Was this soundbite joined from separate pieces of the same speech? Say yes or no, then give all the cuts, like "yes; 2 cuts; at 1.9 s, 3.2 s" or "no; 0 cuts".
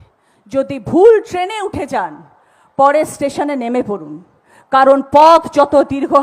no; 0 cuts